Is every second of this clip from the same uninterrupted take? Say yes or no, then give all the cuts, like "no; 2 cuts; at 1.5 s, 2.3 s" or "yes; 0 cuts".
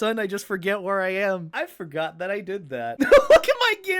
no; 1 cut; at 1.5 s